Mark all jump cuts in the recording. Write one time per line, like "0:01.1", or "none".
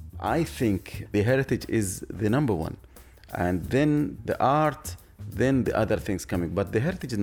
0:00.9